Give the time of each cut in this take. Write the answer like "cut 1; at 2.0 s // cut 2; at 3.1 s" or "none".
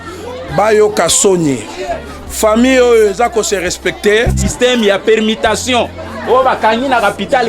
cut 1; at 4.4 s